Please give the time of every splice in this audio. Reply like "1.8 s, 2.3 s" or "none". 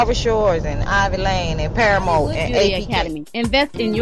2.7 s